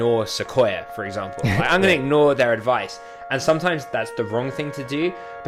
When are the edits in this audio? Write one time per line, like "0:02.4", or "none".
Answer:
none